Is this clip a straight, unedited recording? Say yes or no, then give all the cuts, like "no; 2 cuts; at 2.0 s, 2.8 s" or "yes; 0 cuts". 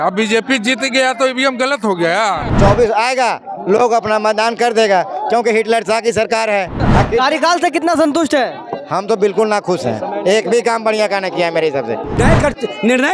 no; 3 cuts; at 2.5 s, 6.8 s, 12.1 s